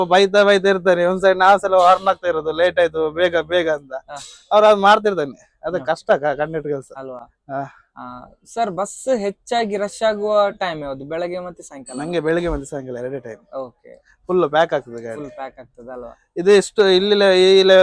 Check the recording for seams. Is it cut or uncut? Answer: uncut